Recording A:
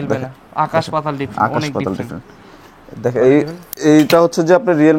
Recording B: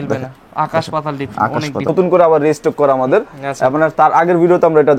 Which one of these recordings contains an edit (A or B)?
B